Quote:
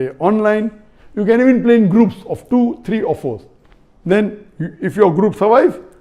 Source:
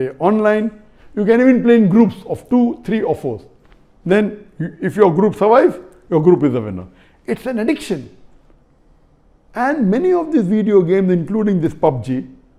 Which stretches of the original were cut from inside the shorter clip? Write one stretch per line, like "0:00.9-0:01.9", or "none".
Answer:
none